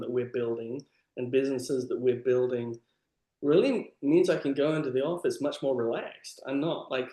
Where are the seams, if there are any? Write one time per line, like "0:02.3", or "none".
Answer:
none